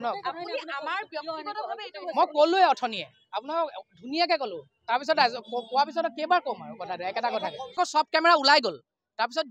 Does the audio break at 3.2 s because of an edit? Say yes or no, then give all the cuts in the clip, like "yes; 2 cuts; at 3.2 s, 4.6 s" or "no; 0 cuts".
no; 1 cut; at 7.7 s